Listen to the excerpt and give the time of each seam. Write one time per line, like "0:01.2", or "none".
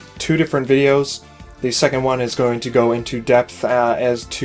none